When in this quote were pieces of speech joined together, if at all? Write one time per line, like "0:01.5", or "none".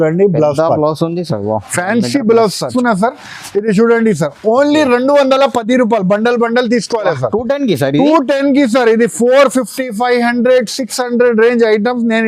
0:02.7